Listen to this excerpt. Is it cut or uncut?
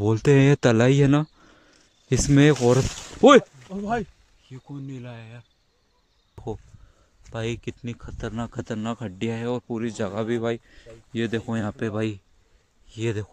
cut